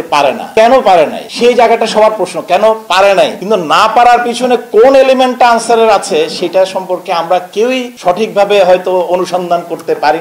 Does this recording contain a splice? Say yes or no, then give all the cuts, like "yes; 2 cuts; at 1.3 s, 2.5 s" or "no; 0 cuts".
no; 0 cuts